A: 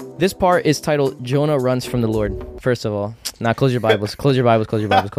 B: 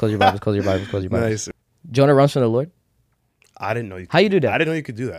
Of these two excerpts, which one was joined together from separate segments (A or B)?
B